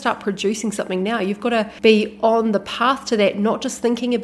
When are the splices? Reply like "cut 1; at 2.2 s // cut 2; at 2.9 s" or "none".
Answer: cut 1; at 1.7 s